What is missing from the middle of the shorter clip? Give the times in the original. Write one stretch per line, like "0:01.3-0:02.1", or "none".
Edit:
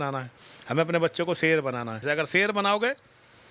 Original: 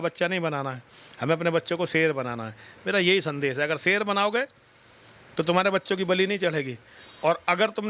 0:02.5-0:03.5